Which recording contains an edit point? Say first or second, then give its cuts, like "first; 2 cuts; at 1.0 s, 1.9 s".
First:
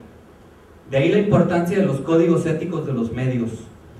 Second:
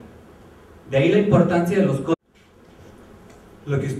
first; 1 cut; at 2.1 s